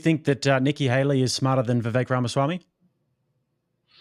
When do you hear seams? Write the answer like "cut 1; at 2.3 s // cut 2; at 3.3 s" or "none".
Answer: none